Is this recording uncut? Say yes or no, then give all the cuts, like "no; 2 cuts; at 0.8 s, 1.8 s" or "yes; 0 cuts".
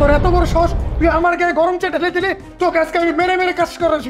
no; 1 cut; at 2.4 s